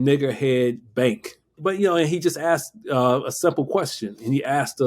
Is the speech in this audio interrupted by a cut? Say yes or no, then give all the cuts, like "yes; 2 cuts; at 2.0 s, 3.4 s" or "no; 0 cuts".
yes; 1 cut; at 1.5 s